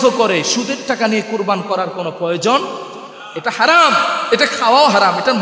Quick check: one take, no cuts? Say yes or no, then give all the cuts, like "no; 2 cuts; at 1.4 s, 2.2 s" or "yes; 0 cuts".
yes; 0 cuts